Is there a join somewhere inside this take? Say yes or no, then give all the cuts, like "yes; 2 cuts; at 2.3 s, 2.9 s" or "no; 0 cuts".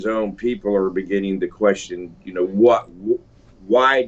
no; 0 cuts